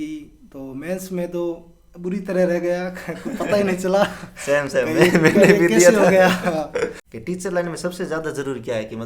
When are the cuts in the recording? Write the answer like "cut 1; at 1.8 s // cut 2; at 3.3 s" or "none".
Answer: cut 1; at 7.1 s